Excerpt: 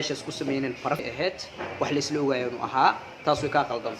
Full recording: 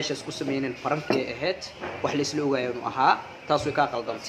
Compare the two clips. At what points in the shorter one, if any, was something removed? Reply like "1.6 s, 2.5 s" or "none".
1.0 s